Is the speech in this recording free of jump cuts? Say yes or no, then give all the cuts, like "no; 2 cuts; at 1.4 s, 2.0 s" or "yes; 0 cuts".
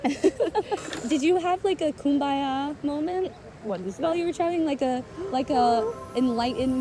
no; 1 cut; at 0.9 s